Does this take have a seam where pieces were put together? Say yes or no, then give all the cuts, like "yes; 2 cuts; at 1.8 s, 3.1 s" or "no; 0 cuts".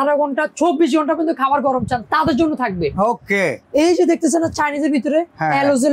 no; 0 cuts